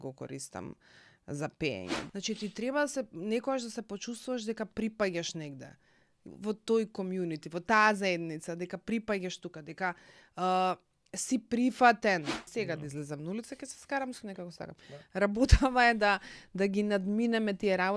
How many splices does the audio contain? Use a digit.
2